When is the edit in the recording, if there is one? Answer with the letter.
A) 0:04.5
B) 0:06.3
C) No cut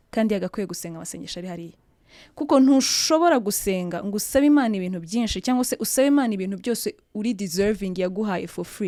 C